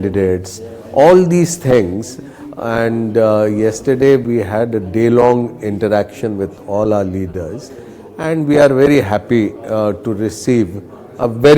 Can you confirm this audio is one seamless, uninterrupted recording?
yes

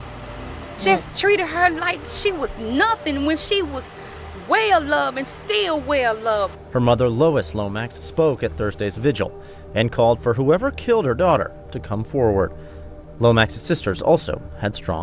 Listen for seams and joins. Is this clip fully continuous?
yes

